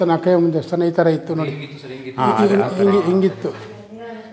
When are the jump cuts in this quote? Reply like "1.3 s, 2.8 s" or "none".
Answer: none